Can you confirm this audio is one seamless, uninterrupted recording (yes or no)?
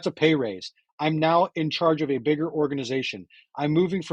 no